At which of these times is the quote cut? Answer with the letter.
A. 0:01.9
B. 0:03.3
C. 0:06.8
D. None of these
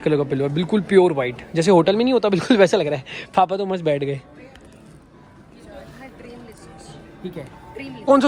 D